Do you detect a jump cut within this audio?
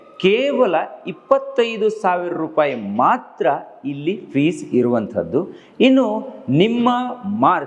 no; 0 cuts

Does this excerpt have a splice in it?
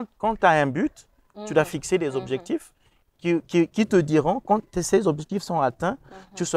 no; 0 cuts

